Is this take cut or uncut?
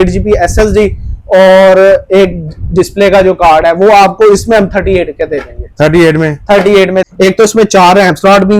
cut